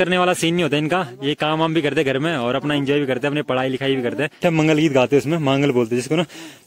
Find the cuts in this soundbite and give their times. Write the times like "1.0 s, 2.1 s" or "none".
4.4 s